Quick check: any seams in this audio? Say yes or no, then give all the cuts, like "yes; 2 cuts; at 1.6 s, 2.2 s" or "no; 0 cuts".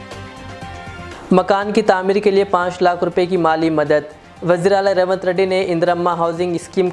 no; 0 cuts